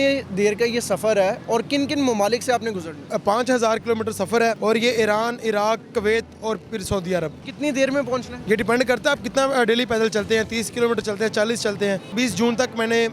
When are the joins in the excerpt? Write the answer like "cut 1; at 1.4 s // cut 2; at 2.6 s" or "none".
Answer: cut 1; at 3.1 s // cut 2; at 4.6 s // cut 3; at 7.4 s // cut 4; at 8.3 s // cut 5; at 12.1 s